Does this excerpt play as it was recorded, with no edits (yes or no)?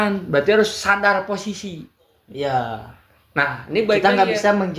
yes